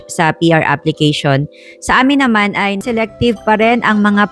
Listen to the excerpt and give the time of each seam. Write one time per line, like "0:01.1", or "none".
0:02.8